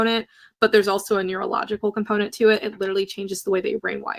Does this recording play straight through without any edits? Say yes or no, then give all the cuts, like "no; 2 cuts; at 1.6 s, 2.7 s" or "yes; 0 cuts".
yes; 0 cuts